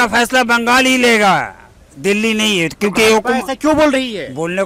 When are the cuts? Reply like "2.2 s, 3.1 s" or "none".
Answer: none

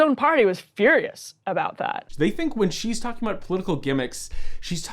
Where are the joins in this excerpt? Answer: 2.0 s

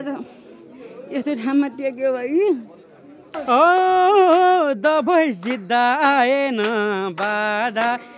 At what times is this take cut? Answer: 3.3 s

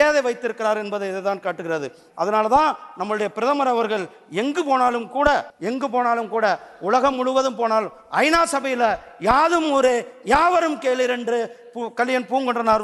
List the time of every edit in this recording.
5.5 s

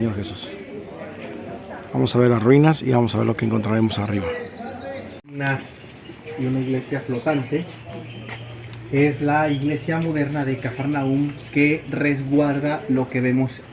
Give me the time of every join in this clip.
5.2 s

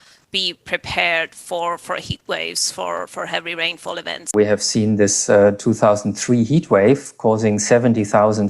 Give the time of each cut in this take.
4.3 s

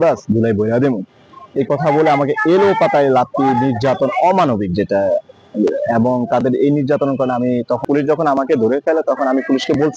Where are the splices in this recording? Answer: 7.8 s

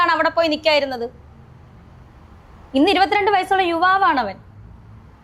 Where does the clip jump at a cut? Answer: none

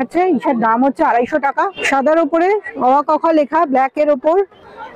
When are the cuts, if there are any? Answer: 1.8 s

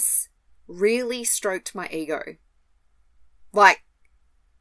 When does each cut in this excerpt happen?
none

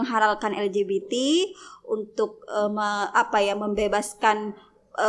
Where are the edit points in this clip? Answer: none

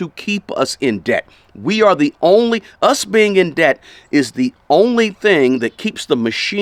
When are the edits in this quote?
none

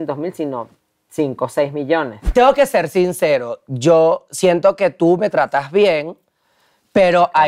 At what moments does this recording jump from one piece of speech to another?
2.2 s

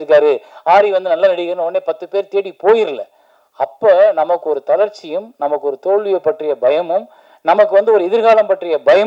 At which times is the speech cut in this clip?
none

